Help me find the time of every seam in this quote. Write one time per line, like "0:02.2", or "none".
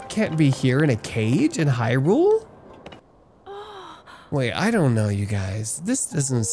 0:03.0

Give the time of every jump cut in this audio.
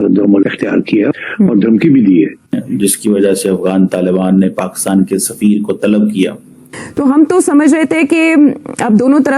0:02.6
0:06.9

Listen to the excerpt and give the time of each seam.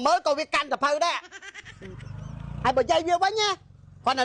0:01.5

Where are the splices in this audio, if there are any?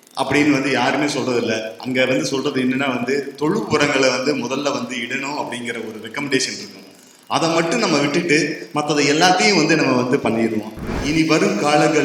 0:11.0

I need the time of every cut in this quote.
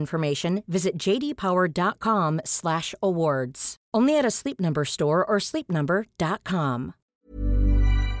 0:07.0

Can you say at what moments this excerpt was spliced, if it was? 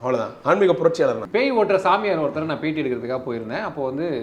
0:01.2

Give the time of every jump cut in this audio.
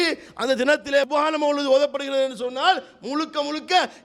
0:01.1

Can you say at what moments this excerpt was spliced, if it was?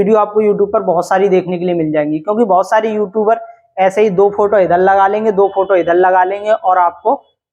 none

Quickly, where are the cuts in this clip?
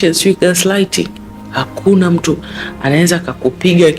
none

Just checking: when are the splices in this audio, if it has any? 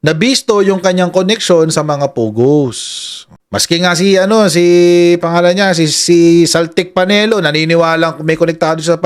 none

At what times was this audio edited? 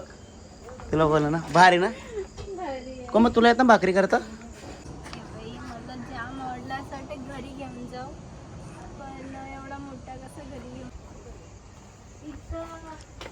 0:04.8
0:10.9

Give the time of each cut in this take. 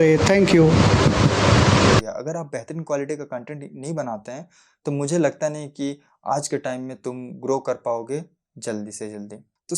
0:02.0

